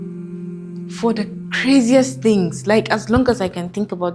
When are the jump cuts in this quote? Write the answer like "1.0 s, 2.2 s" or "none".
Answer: 1.0 s